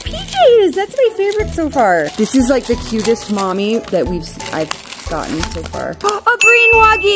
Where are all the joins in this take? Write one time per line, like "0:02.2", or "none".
0:02.1
0:06.0